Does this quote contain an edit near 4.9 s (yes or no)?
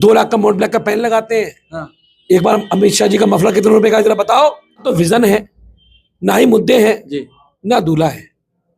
yes